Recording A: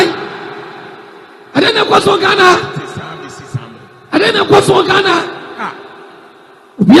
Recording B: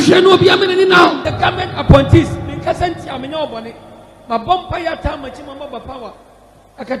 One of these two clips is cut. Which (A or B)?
B